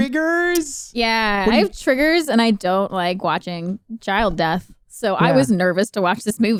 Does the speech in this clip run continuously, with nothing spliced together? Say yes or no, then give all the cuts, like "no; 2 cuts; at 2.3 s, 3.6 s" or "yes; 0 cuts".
yes; 0 cuts